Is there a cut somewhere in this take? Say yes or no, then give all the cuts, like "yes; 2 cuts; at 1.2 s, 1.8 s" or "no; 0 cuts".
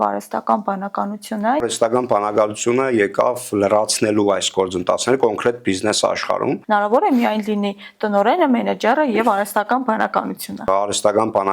yes; 3 cuts; at 1.6 s, 6.6 s, 10.7 s